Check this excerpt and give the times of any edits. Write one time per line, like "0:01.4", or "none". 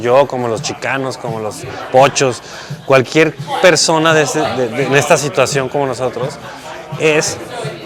none

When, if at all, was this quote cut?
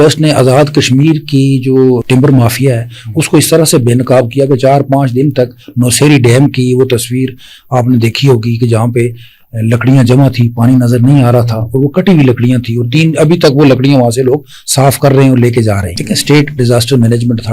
0:02.0
0:15.9

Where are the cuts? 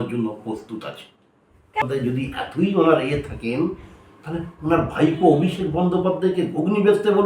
0:01.8

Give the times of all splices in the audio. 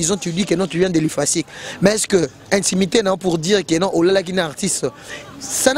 none

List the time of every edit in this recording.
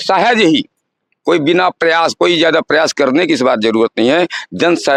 none

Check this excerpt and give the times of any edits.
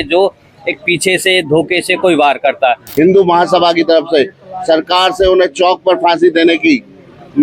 0:02.8

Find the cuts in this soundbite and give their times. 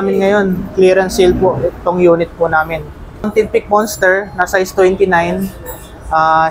0:03.3

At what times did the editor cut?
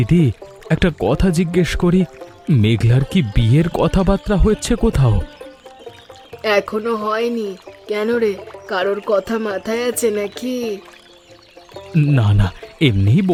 none

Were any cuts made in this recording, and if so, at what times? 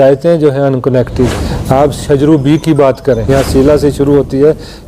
0:01.5
0:03.3

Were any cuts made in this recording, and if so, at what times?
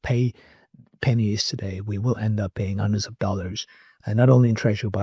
none

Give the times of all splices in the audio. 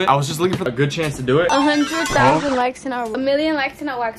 0:01.5

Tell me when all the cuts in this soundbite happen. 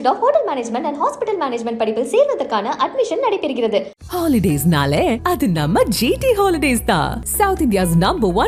none

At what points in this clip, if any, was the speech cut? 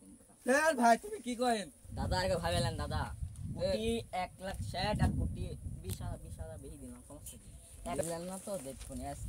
0:01.9
0:08.0

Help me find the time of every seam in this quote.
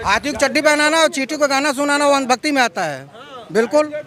none

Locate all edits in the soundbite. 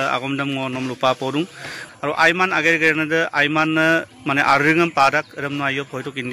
0:01.7

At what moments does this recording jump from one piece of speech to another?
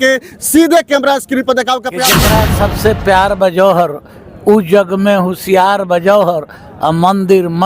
0:02.2

